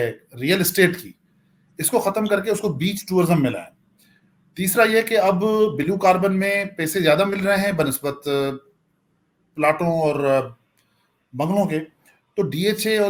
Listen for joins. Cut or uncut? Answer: uncut